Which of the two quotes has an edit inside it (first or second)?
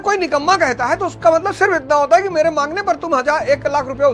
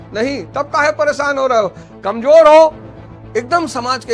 second